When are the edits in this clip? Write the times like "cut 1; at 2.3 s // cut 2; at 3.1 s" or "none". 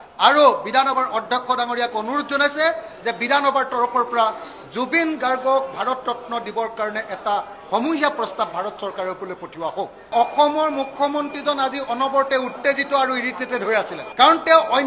cut 1; at 10.1 s // cut 2; at 14.0 s